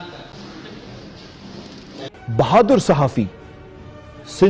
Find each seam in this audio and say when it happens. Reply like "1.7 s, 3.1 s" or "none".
2.1 s